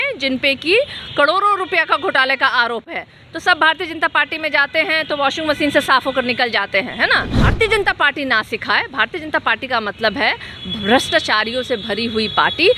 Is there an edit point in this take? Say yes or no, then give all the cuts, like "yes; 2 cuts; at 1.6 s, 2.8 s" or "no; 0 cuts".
yes; 1 cut; at 7.4 s